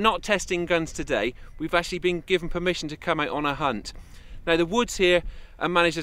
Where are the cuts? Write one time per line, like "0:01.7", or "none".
0:01.2